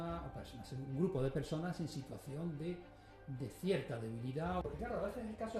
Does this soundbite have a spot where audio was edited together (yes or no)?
yes